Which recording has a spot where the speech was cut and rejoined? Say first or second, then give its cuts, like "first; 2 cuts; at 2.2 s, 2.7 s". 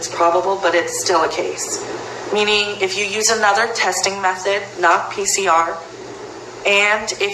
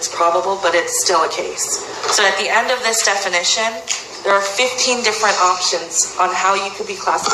second; 1 cut; at 1.9 s